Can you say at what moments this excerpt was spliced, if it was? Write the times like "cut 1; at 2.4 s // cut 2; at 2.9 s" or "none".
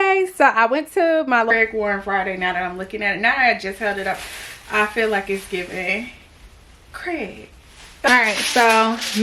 cut 1; at 1.5 s // cut 2; at 8.1 s

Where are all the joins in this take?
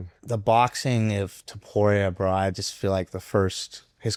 none

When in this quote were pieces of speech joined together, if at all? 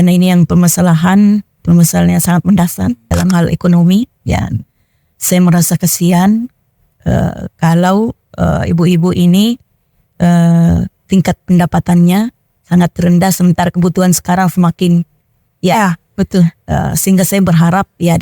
cut 1; at 3.1 s

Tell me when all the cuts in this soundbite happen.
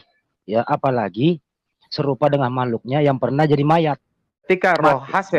cut 1; at 4.5 s

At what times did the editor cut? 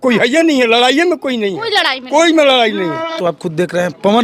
cut 1; at 3.2 s

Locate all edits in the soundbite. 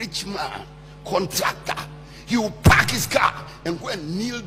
none

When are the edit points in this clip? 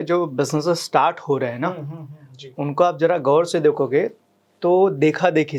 none

